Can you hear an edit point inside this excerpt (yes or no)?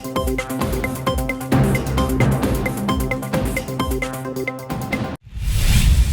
yes